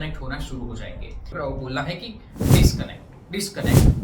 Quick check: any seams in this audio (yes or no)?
yes